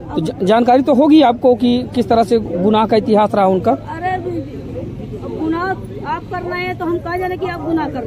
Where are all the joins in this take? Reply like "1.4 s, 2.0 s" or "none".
none